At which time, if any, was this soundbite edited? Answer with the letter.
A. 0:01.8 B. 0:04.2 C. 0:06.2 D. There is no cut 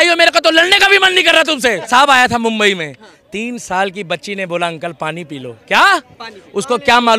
A